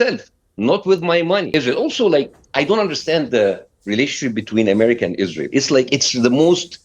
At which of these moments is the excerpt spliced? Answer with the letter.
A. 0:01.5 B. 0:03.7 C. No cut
A